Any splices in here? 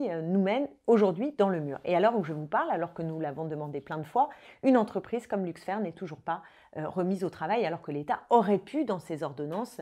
no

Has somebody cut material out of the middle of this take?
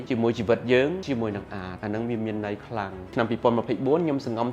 yes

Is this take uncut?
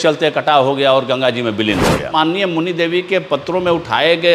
no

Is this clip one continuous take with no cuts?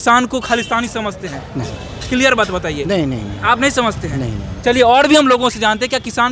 yes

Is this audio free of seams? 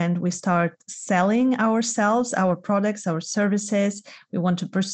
yes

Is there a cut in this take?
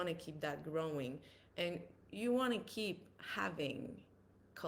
no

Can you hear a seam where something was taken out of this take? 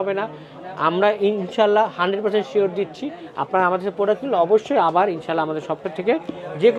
no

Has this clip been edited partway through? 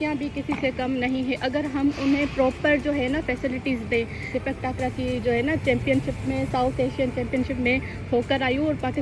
no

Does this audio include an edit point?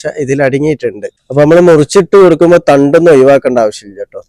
yes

